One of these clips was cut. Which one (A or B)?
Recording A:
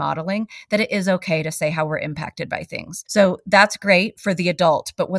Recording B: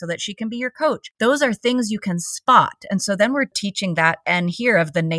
B